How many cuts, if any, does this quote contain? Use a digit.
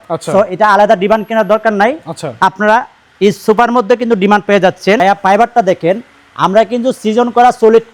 1